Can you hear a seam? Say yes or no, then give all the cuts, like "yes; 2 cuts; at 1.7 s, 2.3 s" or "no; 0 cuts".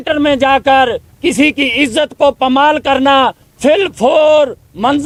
no; 0 cuts